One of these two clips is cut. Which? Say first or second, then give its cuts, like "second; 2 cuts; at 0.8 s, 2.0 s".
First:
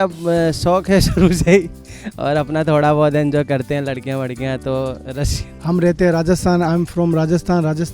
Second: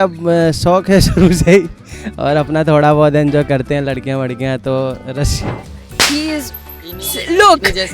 second; 1 cut; at 5.5 s